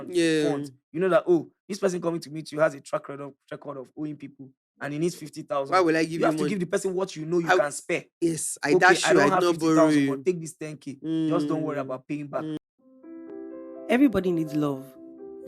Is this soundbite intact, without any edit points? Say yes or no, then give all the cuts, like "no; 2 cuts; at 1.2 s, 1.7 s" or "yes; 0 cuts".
no; 1 cut; at 12.6 s